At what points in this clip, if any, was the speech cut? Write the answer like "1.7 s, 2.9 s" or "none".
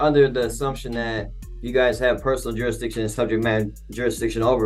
none